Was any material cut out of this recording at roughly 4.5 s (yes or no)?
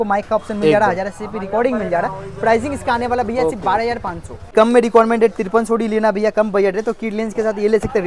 yes